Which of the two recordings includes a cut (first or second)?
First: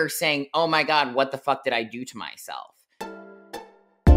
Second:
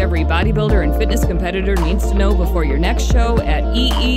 first